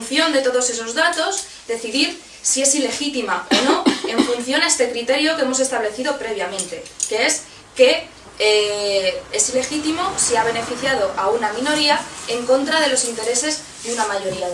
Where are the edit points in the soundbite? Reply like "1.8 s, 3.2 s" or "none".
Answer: 12.6 s